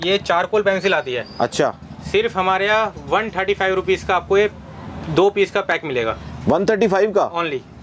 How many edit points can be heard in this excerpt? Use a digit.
0